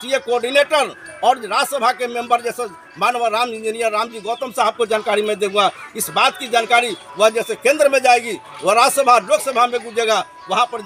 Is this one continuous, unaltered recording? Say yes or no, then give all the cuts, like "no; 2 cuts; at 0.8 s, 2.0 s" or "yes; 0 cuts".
yes; 0 cuts